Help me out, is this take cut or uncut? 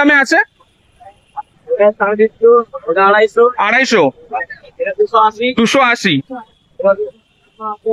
uncut